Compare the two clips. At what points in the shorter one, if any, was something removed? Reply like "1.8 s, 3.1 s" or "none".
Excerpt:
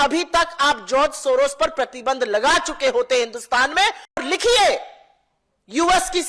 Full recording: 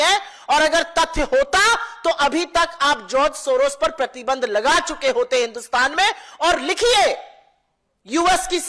4.2 s